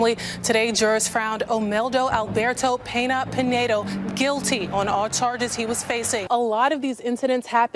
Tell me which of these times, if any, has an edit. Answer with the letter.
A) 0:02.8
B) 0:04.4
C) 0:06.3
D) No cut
C